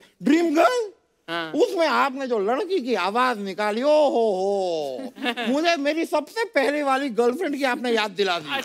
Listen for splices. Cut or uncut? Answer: uncut